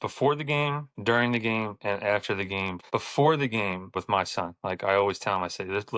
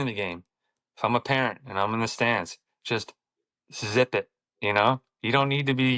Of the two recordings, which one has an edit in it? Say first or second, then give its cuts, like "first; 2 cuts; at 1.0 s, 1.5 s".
first; 3 cuts; at 0.9 s, 2.8 s, 4.0 s